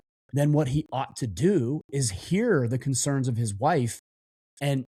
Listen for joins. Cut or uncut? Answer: uncut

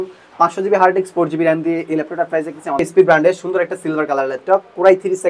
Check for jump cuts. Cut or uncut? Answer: cut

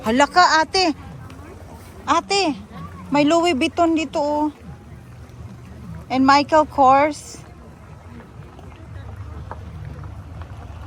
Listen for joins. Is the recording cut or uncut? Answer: uncut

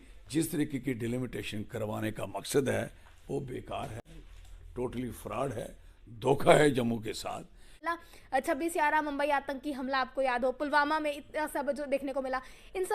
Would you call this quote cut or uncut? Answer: cut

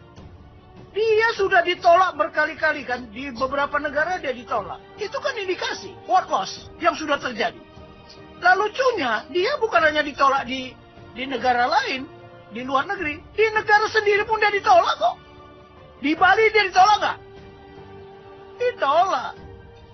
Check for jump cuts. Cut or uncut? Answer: uncut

